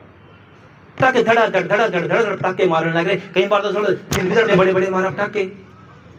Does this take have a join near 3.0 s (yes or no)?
no